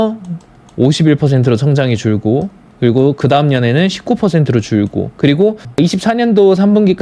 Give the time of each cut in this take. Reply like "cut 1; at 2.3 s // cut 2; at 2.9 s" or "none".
cut 1; at 5.6 s

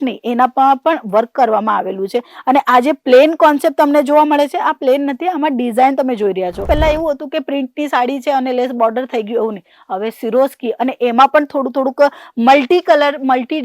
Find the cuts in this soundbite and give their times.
cut 1; at 6.6 s

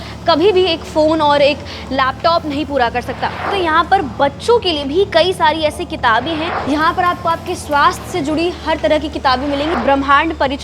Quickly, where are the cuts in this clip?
cut 1; at 3.4 s // cut 2; at 6.5 s // cut 3; at 9.7 s

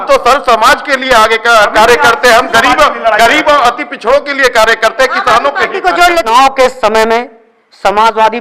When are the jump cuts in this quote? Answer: cut 1; at 6.3 s

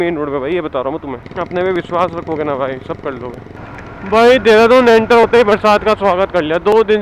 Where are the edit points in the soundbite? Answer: cut 1; at 1.2 s // cut 2; at 3.5 s

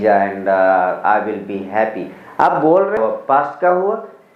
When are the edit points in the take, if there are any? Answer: cut 1; at 3.0 s

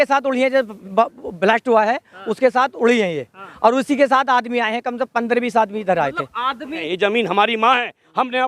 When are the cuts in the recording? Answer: cut 1; at 6.8 s

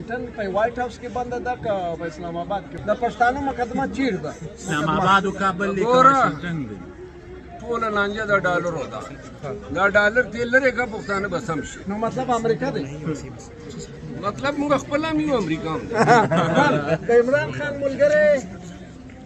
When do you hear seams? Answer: cut 1; at 2.7 s

